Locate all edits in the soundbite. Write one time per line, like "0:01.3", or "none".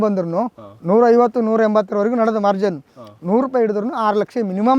none